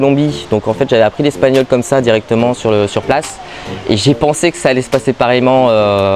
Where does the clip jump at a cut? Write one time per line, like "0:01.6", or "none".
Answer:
none